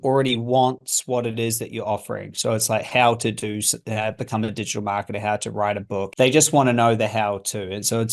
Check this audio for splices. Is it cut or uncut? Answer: cut